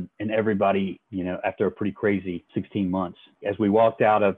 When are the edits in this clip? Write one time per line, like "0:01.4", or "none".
0:01.0
0:02.4
0:03.4